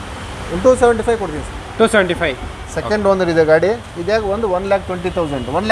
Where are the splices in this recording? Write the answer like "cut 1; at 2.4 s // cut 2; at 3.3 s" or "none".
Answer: cut 1; at 2.7 s